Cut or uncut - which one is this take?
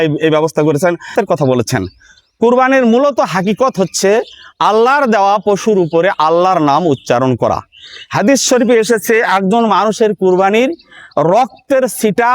cut